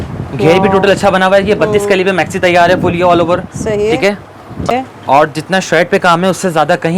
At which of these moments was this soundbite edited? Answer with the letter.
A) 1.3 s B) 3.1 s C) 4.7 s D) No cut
C